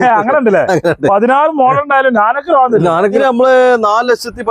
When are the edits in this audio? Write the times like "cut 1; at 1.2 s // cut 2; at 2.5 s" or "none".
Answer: cut 1; at 3.2 s